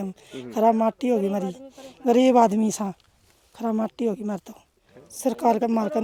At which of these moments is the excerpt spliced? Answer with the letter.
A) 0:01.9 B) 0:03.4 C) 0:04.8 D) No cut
D